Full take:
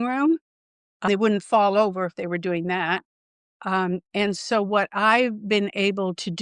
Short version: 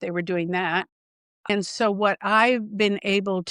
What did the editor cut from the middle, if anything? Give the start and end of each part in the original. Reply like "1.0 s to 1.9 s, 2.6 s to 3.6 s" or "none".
3.6 s to 4.2 s